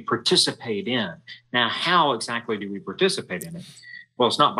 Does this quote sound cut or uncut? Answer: uncut